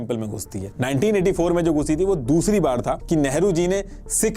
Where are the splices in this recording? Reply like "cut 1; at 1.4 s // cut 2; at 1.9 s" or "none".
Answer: cut 1; at 3.0 s